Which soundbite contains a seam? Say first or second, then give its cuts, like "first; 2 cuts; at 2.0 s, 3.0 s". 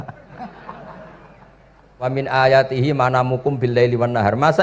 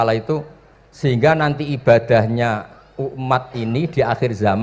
first; 1 cut; at 2.1 s